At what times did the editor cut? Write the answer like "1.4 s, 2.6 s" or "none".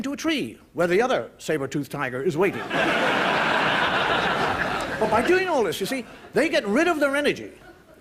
5.4 s